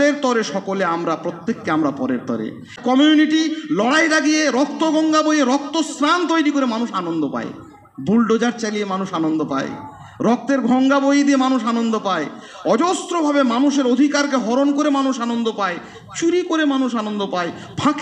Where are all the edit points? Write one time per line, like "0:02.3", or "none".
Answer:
0:02.8